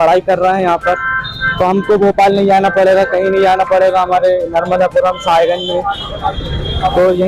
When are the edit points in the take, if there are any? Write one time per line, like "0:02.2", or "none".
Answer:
none

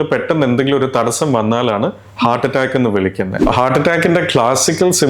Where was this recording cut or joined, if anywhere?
0:03.5

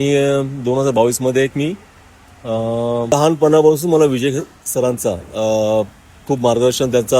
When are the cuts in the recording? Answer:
0:03.1

